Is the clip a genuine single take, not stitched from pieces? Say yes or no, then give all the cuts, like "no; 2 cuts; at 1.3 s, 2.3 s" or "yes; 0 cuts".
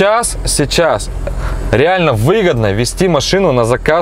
yes; 0 cuts